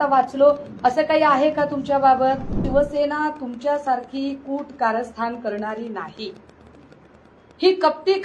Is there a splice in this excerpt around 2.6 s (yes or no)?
yes